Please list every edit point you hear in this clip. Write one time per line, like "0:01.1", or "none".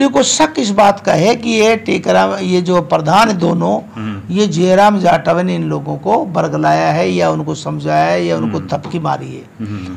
none